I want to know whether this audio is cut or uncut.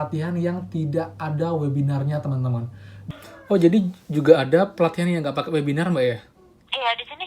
cut